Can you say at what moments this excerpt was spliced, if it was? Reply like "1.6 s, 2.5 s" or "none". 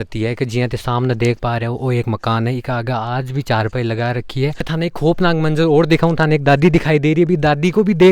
4.7 s